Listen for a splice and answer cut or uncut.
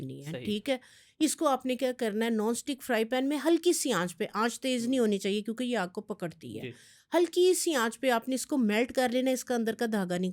uncut